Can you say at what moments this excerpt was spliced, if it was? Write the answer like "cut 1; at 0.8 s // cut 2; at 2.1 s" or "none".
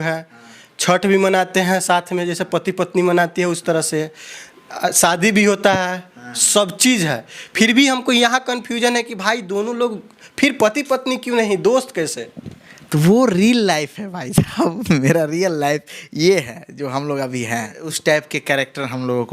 cut 1; at 17.8 s